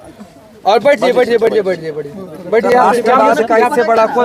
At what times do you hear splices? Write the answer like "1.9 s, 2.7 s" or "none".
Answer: none